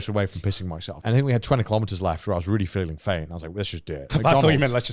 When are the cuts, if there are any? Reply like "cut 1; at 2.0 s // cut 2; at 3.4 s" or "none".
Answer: cut 1; at 0.9 s // cut 2; at 4.0 s